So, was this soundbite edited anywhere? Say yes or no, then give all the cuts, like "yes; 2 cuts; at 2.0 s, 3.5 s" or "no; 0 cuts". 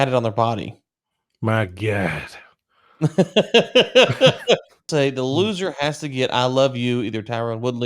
yes; 1 cut; at 4.9 s